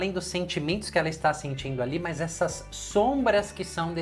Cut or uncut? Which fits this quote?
uncut